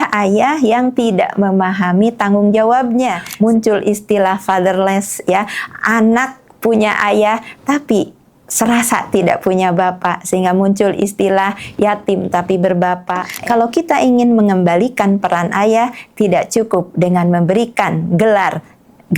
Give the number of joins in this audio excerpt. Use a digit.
2